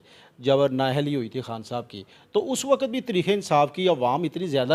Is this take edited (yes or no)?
no